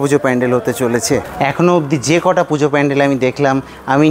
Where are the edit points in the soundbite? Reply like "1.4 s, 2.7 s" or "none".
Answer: 1.3 s